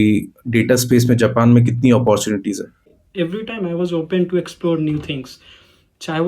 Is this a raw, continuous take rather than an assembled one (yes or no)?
no